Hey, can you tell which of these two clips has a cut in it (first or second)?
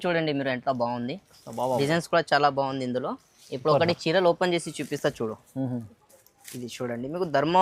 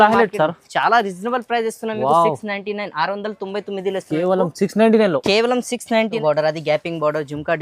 second